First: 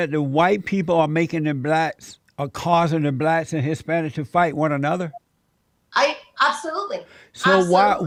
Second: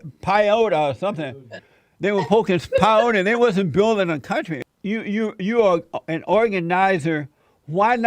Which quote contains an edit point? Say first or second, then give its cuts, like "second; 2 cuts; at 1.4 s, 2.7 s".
second; 1 cut; at 4.5 s